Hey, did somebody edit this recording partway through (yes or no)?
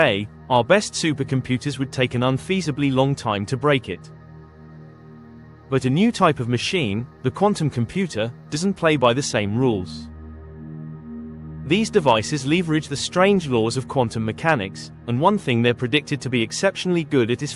yes